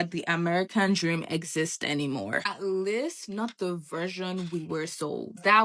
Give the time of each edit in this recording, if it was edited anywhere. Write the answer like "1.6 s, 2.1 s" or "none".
none